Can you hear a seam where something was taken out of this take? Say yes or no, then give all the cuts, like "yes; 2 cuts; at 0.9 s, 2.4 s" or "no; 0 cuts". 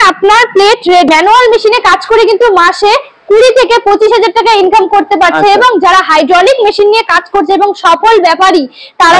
yes; 1 cut; at 1.1 s